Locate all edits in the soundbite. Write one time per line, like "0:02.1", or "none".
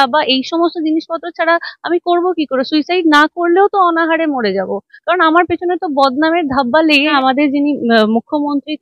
0:07.1